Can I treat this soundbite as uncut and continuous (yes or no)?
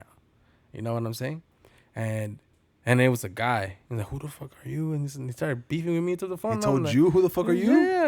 yes